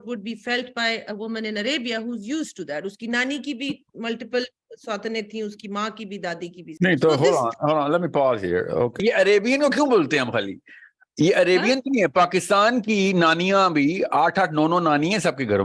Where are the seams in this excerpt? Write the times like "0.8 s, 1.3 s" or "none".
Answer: 6.7 s, 8.9 s